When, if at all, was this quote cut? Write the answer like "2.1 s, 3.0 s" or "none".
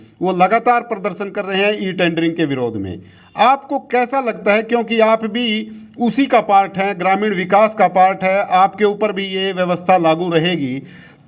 none